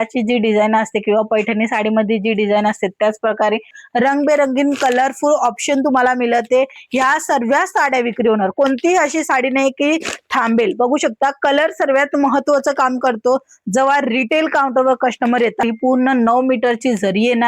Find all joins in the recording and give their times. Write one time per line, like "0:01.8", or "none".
0:03.8
0:15.6